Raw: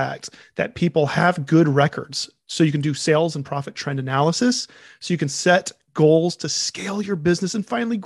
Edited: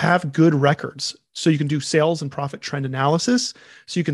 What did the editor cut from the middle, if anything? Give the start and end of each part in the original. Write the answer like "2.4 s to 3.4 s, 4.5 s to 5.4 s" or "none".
none